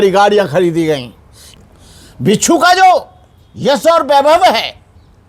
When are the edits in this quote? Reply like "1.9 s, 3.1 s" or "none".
1.4 s